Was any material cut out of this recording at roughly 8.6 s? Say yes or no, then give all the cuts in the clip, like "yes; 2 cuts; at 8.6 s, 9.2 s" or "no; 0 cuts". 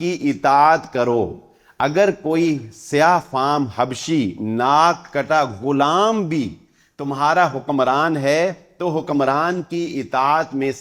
no; 0 cuts